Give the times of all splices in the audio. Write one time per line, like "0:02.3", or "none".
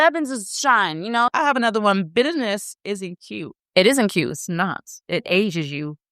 0:01.3